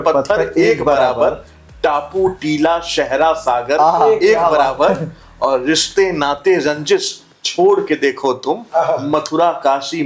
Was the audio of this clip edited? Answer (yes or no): no